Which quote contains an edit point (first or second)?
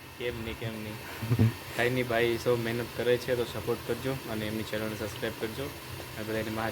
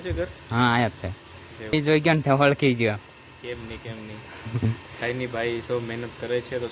second